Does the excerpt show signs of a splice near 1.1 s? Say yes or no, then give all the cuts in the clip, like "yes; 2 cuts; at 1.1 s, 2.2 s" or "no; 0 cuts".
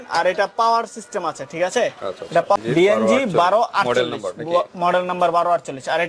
no; 1 cut; at 2.6 s